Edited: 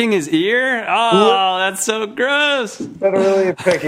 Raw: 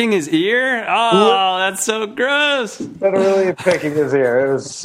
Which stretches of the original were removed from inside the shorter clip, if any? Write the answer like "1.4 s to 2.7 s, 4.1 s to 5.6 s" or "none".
none